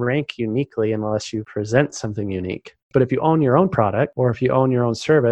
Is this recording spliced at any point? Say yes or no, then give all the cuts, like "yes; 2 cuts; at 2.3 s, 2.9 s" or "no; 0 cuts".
yes; 3 cuts; at 1.4 s, 2.9 s, 4.1 s